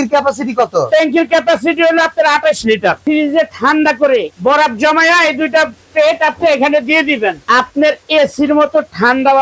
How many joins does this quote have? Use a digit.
3